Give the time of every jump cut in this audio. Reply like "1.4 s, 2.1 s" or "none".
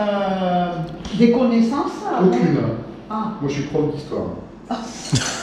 none